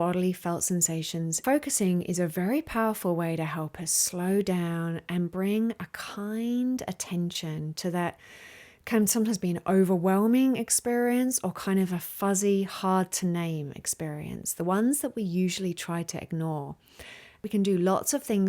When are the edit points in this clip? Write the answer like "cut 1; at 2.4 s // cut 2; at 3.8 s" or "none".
cut 1; at 1.4 s // cut 2; at 17.4 s

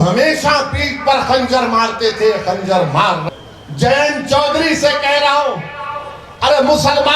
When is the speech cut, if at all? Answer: cut 1; at 3.2 s

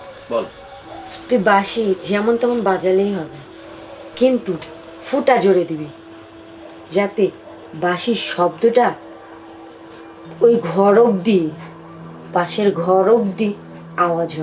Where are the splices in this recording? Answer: none

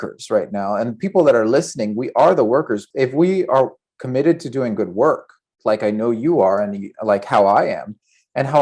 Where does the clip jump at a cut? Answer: cut 1; at 2.8 s

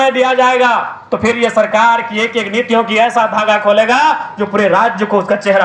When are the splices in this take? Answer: none

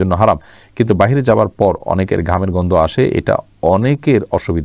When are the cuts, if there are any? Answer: none

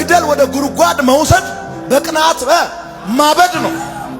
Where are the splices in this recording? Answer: none

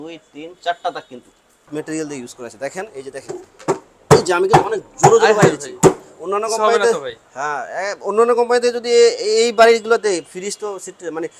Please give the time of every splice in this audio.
cut 1; at 1.7 s

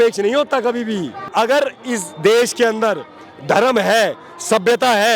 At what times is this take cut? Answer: cut 1; at 1.2 s

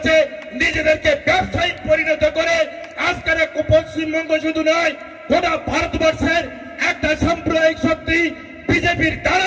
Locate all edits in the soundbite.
none

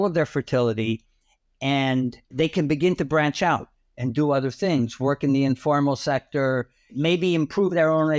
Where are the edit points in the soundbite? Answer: cut 1; at 2.3 s // cut 2; at 6.9 s

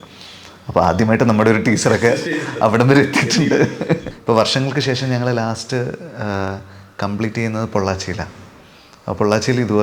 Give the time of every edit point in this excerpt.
cut 1; at 4.0 s

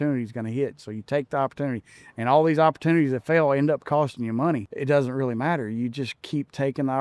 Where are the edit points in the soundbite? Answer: cut 1; at 4.7 s

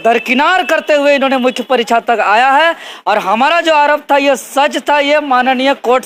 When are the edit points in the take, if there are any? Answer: none

